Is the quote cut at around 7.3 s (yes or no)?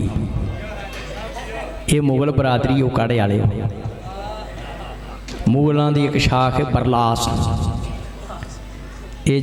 no